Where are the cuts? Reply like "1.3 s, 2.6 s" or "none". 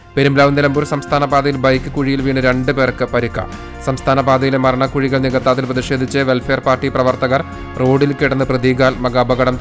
none